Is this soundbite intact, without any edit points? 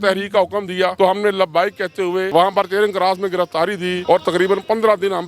no; 3 cuts; at 0.9 s, 2.3 s, 4.0 s

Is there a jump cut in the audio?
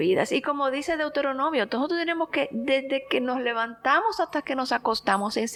no; 0 cuts

